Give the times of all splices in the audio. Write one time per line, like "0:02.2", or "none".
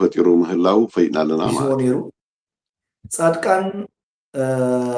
0:01.6